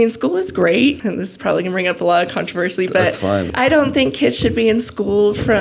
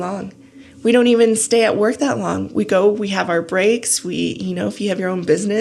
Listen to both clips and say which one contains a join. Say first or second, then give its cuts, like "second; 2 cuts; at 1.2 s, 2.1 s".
first; 2 cuts; at 1.0 s, 3.5 s